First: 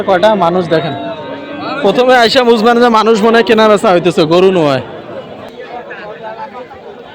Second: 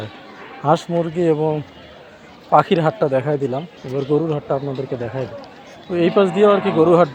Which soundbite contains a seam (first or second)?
first